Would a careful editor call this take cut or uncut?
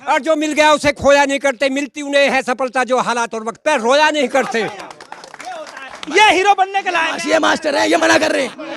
uncut